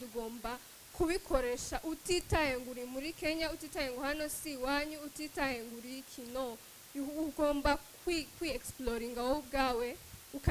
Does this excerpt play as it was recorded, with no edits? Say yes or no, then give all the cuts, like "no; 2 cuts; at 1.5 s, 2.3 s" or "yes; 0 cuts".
yes; 0 cuts